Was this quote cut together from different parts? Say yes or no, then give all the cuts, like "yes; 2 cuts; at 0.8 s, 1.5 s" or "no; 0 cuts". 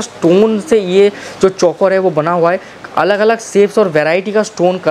no; 0 cuts